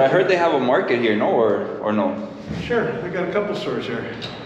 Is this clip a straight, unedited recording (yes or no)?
yes